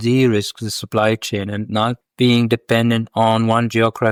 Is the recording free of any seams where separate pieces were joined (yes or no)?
yes